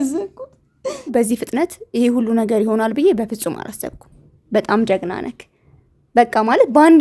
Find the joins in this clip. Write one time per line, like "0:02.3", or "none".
0:01.1